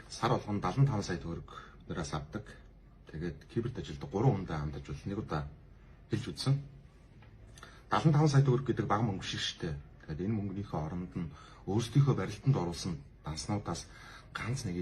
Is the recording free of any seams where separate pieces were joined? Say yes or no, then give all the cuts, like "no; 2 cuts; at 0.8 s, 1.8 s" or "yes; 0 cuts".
yes; 0 cuts